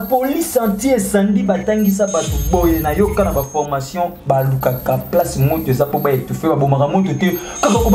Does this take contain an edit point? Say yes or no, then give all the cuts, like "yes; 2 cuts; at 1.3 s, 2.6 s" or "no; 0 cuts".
no; 0 cuts